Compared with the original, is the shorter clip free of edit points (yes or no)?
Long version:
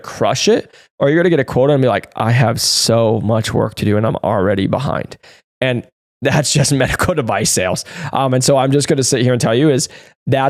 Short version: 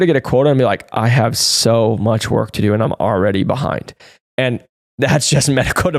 yes